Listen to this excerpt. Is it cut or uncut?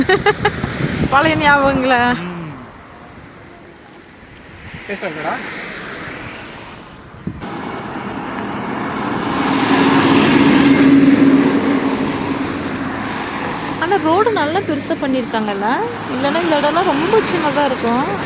uncut